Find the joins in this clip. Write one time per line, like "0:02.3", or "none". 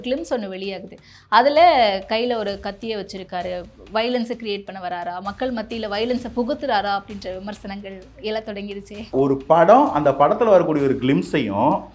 0:09.1